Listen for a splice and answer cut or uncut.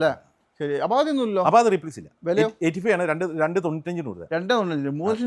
uncut